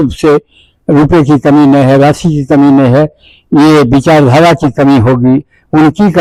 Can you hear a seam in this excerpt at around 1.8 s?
no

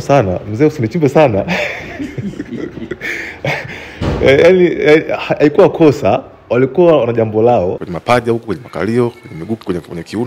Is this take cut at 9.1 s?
no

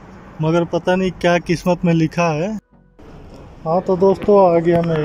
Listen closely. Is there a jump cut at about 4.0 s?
no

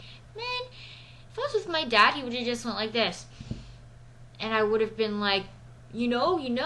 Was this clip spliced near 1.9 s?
no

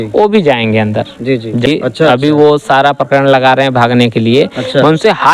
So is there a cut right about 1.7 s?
yes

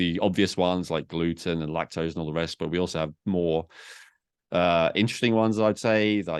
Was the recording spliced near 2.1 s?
no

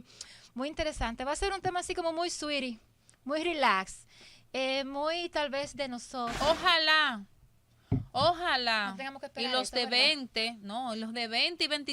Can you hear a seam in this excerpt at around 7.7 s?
no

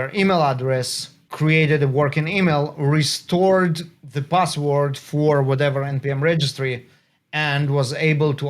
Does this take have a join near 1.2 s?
yes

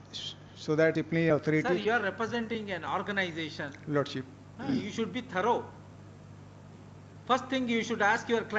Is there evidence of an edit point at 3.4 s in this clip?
no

